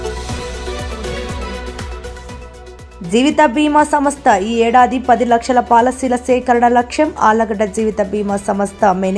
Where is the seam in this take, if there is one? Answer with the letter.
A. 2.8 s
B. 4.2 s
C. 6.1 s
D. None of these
A